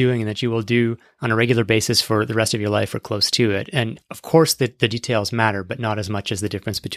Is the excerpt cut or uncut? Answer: cut